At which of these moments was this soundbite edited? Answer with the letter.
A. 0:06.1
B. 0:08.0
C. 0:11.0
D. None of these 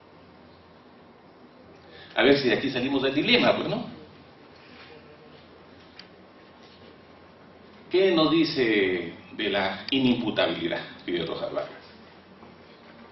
D